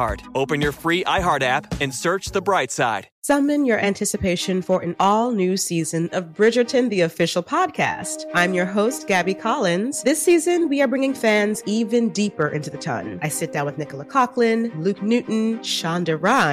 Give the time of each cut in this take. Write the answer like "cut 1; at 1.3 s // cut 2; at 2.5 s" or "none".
cut 1; at 3.1 s